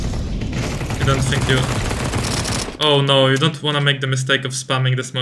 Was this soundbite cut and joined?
no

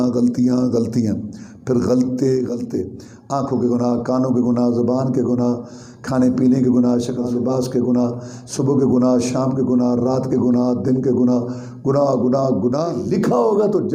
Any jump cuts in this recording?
yes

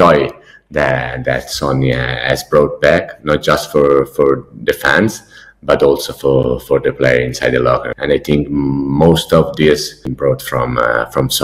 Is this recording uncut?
no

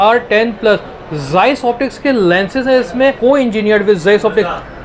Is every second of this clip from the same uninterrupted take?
no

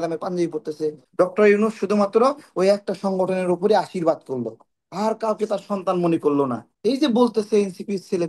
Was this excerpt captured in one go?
no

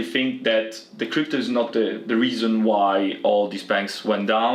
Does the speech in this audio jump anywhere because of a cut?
no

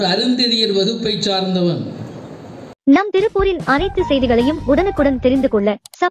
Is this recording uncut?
no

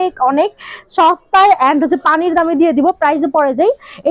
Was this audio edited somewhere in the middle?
no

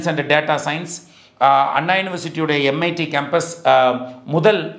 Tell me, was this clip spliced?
no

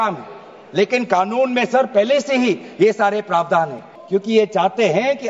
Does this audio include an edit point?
yes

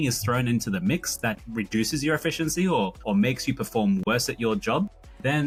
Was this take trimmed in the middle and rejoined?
no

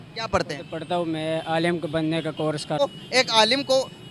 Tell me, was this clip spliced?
yes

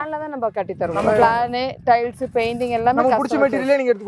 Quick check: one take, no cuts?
no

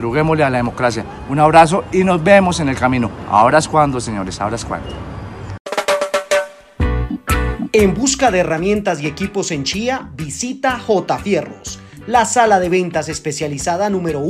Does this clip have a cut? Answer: yes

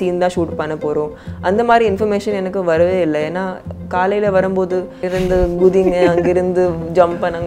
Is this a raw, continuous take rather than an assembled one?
yes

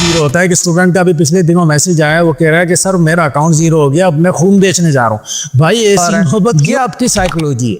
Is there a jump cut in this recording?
yes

